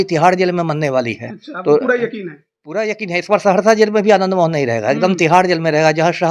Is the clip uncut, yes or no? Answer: yes